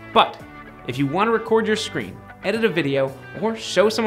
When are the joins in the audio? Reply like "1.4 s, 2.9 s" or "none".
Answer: none